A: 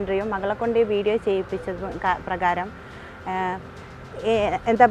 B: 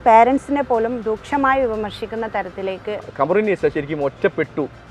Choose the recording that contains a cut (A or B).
B